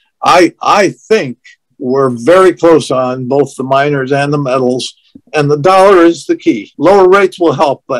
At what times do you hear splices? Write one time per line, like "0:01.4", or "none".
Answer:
0:06.7

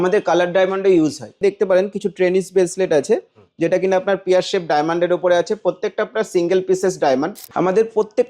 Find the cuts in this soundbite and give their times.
0:01.4
0:07.4

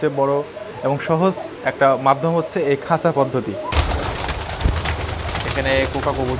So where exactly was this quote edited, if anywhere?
0:03.8

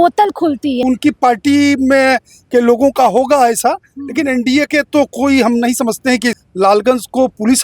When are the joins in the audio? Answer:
0:00.8
0:06.4

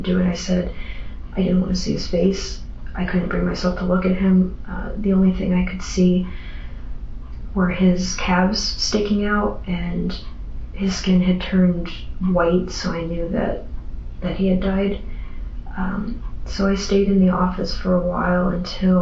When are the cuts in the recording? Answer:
none

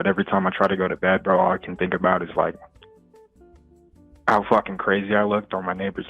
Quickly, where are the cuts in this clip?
none

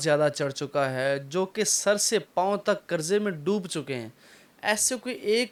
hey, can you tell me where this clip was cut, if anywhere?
none

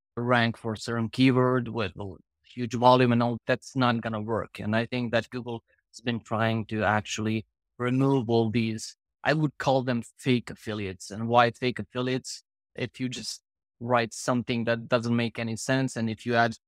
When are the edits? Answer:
0:12.7

